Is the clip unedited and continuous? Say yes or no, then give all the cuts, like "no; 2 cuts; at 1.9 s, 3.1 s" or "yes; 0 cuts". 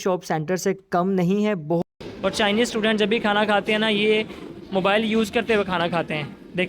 no; 1 cut; at 1.8 s